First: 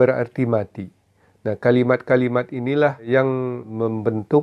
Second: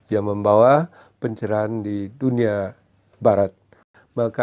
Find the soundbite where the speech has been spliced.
first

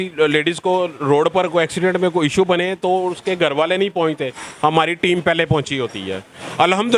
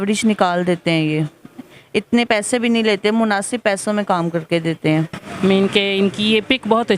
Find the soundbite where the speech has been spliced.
second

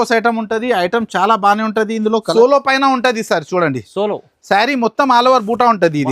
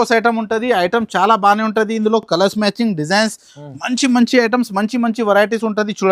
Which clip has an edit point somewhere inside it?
first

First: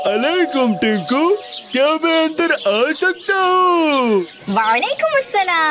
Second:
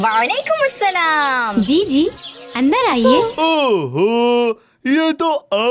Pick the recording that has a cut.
second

